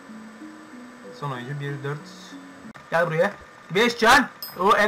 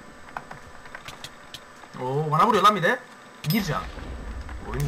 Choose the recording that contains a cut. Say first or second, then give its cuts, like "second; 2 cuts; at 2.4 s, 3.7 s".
first; 1 cut; at 2.7 s